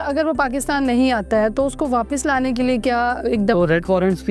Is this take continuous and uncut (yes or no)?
yes